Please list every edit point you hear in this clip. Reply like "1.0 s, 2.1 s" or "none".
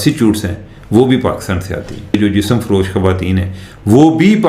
2.1 s